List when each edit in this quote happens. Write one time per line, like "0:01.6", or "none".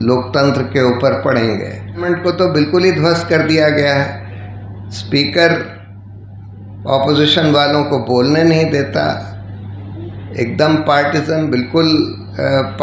0:02.1